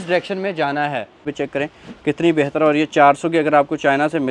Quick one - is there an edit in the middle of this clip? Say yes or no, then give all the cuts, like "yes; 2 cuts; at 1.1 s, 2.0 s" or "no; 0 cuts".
yes; 1 cut; at 1.3 s